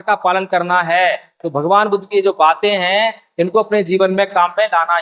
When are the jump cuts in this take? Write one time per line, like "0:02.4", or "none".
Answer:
0:01.3